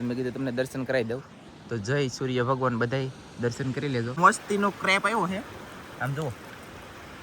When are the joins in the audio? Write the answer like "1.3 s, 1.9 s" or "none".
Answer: 4.2 s